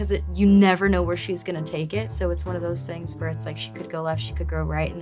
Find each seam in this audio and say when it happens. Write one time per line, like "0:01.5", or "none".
none